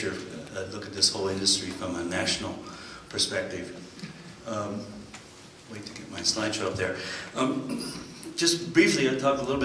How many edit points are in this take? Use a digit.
1